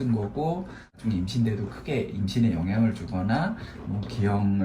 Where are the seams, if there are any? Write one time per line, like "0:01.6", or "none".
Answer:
0:01.0